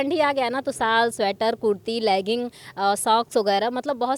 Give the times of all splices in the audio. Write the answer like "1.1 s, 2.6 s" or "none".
none